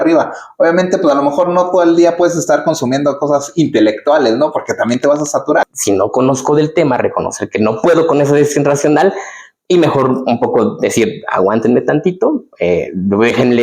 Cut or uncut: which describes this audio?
cut